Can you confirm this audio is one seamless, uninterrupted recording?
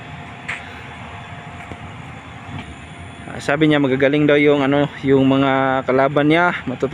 no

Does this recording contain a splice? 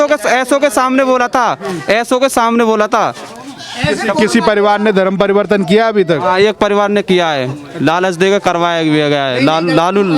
no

